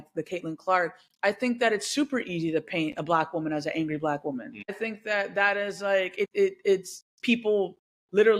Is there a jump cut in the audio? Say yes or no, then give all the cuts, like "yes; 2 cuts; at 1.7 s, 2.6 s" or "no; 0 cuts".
yes; 2 cuts; at 4.8 s, 6.3 s